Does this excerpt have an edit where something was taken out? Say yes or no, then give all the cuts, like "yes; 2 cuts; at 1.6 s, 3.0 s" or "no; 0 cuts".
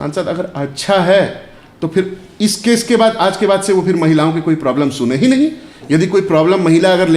no; 0 cuts